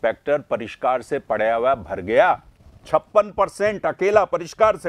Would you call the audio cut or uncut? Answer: uncut